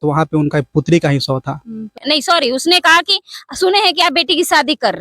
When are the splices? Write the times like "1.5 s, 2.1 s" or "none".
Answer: 2.0 s